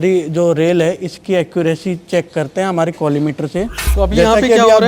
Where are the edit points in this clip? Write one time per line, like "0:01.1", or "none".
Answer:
0:03.8

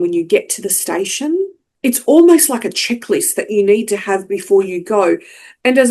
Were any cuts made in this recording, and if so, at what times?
0:01.6

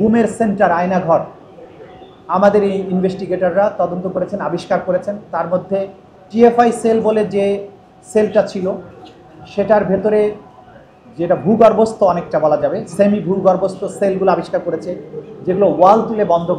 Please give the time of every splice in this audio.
none

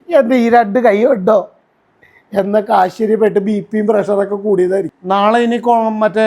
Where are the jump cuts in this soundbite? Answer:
0:05.0

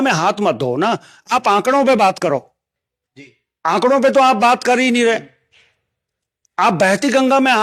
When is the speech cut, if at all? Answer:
none

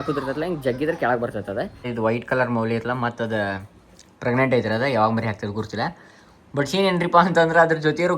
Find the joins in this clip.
0:01.9

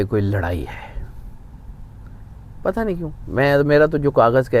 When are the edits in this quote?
none

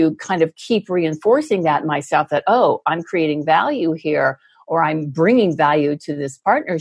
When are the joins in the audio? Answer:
none

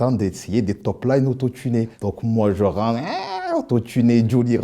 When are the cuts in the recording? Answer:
0:02.0

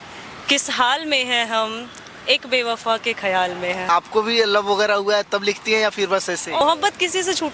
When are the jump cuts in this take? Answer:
0:03.9
0:06.6

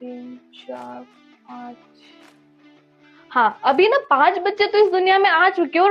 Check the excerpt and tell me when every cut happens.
none

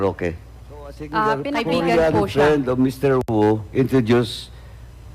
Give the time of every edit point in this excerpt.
0:01.5

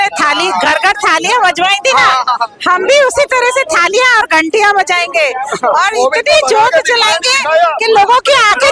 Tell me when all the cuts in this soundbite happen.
none

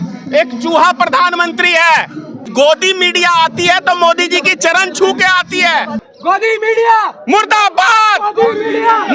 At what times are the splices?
0:02.4
0:06.0

